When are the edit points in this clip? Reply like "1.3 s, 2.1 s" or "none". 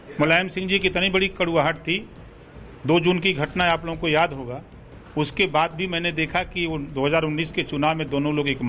none